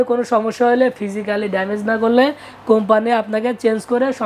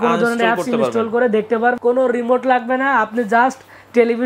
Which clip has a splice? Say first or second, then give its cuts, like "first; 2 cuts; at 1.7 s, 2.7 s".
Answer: second; 1 cut; at 1.8 s